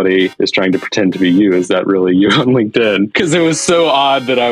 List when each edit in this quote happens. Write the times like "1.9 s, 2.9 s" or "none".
3.1 s